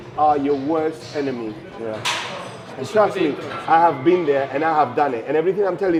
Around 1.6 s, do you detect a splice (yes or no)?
no